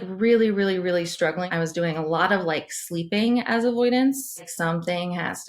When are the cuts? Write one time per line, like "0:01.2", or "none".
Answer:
0:01.5
0:04.5